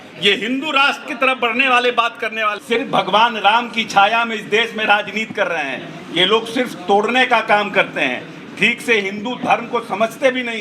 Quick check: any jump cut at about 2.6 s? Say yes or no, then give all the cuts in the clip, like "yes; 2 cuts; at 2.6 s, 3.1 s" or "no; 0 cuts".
yes; 1 cut; at 2.6 s